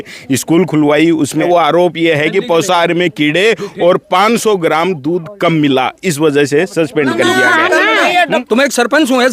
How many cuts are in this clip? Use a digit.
2